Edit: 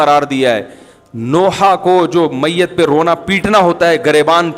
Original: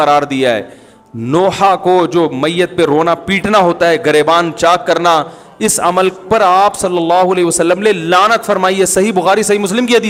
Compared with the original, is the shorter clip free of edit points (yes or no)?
yes